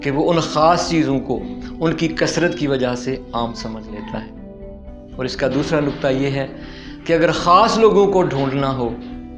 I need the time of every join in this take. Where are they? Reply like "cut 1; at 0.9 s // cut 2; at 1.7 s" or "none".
none